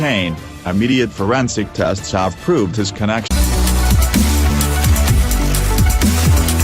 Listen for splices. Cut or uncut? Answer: cut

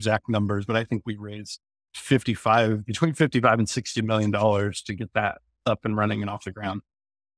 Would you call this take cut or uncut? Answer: uncut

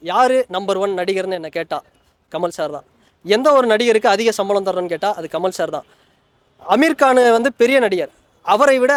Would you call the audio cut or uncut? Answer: uncut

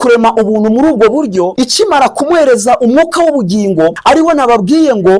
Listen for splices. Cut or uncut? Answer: cut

